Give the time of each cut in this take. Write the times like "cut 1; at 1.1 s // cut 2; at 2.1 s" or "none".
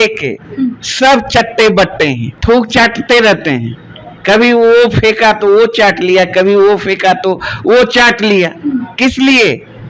cut 1; at 2.3 s